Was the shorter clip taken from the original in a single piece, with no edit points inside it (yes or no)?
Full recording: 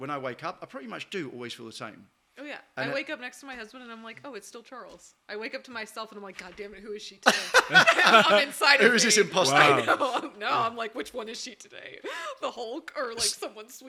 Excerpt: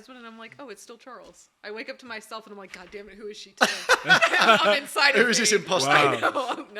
yes